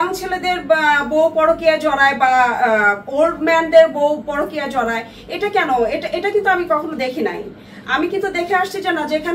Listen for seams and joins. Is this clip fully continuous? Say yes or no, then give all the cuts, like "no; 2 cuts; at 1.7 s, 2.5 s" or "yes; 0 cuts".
yes; 0 cuts